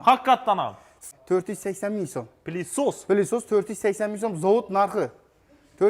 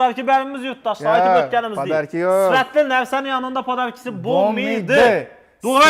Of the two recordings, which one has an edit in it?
first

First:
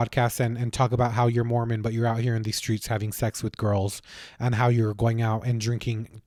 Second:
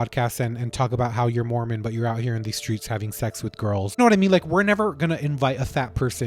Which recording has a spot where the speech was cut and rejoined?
second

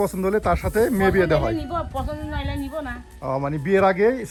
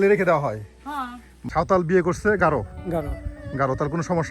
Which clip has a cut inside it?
second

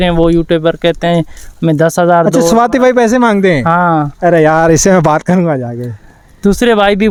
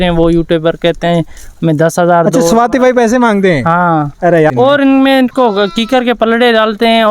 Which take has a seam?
second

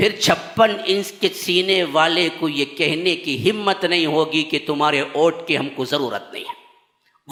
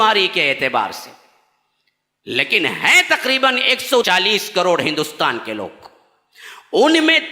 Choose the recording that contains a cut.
second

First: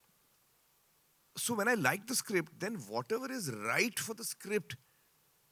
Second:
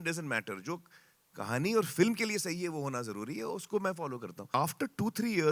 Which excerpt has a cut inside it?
second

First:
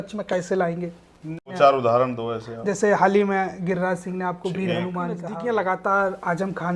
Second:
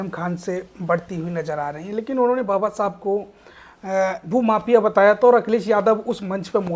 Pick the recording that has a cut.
first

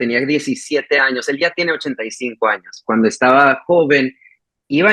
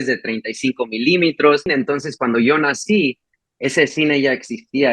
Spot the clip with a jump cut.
second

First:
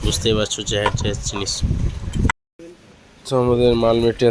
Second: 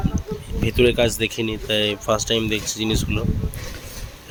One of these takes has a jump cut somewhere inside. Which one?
first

